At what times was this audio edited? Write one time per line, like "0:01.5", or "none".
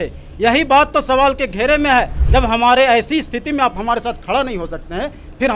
0:02.2

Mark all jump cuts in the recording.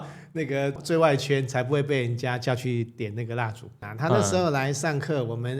0:03.9

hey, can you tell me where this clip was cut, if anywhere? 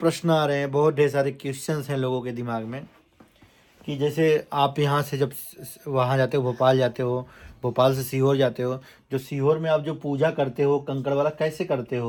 none

